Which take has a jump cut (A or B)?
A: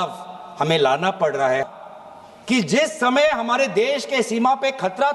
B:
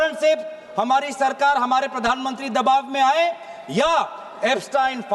A